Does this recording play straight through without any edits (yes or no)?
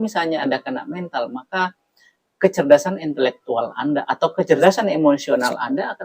no